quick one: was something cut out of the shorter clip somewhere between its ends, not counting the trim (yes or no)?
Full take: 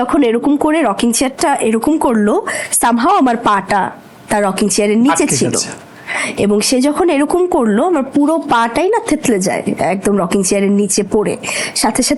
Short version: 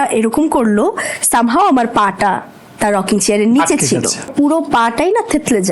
yes